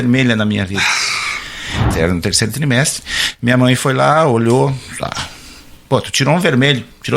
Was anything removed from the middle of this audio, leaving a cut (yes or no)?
yes